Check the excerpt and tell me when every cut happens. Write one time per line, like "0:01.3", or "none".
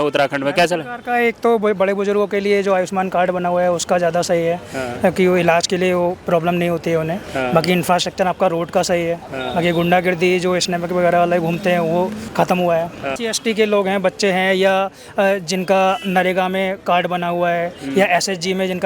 0:12.2
0:13.2